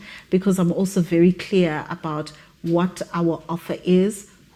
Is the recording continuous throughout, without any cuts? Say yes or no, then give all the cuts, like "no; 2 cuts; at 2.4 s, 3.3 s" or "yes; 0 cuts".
yes; 0 cuts